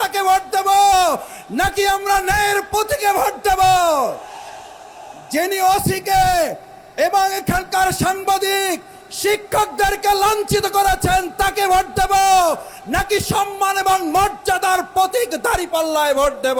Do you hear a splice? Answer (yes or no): no